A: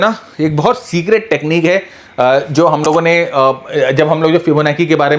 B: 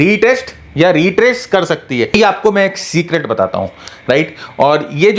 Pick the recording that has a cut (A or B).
B